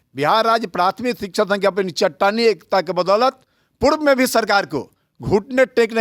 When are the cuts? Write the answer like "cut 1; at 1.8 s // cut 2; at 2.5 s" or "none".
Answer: none